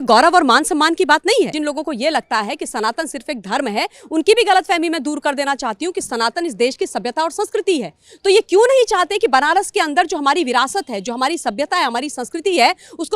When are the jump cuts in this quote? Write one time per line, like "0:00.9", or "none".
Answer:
0:01.5